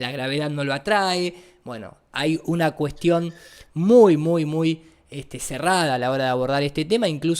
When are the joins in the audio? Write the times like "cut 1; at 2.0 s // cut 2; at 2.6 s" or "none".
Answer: none

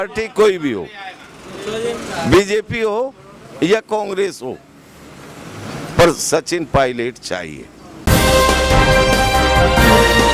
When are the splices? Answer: cut 1; at 8.0 s

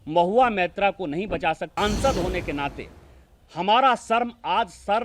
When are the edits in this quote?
cut 1; at 1.7 s

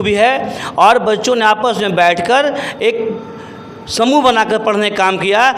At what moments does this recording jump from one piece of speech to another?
none

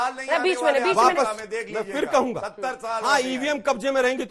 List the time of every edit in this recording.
none

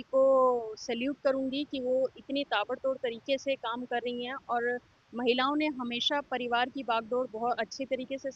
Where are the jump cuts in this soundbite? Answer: none

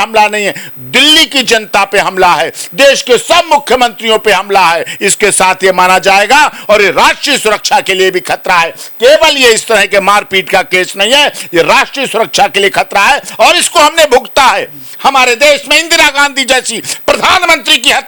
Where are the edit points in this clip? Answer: none

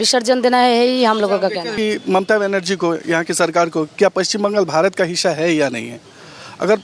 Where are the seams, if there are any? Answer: cut 1; at 1.7 s

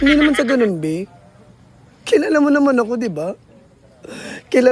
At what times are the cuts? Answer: none

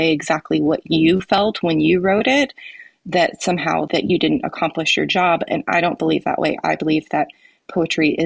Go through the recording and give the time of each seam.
cut 1; at 3.9 s

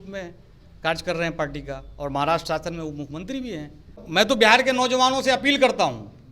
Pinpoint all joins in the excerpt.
cut 1; at 4.0 s

